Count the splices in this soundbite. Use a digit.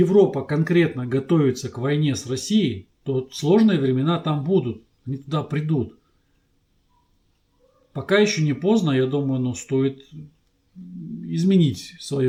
0